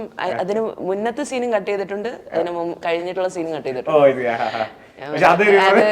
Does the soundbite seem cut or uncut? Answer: uncut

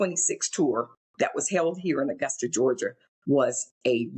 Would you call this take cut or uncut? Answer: cut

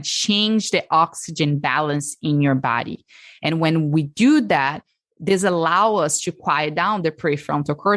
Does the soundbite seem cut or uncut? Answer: uncut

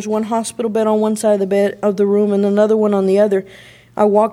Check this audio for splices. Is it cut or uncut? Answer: uncut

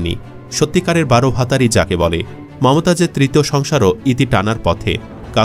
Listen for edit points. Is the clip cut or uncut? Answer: cut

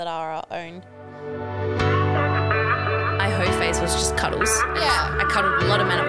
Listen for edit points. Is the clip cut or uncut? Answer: cut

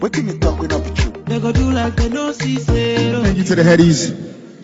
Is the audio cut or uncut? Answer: cut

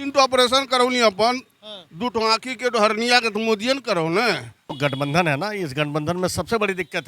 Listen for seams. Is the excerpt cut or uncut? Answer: cut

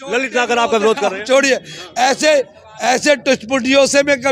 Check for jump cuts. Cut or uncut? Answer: uncut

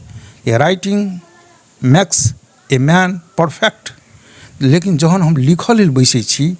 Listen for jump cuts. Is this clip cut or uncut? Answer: uncut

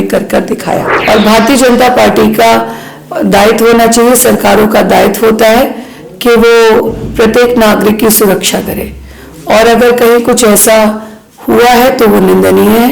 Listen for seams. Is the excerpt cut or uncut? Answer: cut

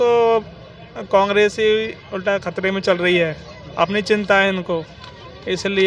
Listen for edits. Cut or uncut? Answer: uncut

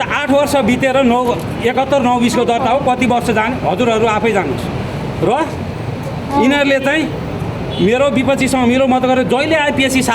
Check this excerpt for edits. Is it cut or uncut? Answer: uncut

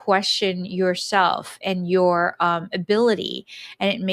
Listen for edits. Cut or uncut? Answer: uncut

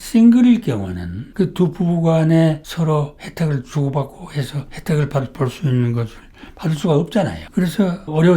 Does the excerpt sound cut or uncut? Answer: cut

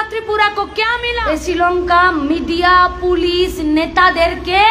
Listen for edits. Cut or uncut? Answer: cut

